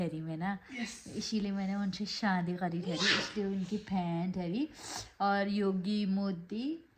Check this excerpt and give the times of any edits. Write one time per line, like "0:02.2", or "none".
none